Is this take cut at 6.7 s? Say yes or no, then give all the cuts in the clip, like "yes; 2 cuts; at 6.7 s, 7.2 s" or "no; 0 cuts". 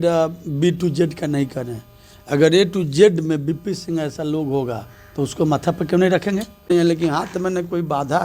yes; 1 cut; at 6.7 s